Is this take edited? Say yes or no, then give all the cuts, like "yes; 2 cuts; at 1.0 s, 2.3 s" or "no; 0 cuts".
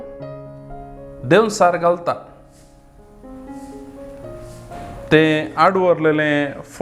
no; 0 cuts